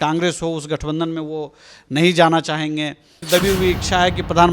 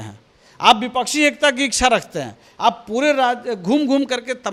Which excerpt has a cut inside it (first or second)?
first